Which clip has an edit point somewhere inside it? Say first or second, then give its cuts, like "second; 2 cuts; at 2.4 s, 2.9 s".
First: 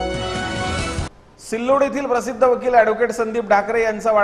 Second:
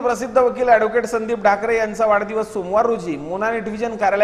first; 1 cut; at 1.1 s